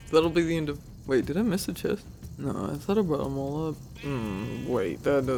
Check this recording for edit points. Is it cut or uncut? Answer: uncut